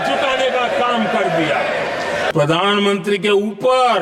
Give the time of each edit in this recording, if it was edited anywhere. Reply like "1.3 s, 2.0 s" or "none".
2.3 s